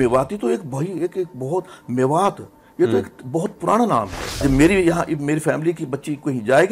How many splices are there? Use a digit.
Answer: 1